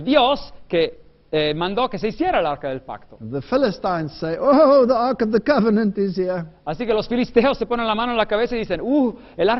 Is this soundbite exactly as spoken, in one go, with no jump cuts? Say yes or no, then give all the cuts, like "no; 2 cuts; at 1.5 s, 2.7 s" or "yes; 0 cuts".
yes; 0 cuts